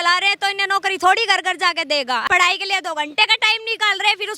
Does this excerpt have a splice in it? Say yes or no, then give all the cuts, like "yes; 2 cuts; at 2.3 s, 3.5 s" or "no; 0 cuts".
yes; 1 cut; at 2.2 s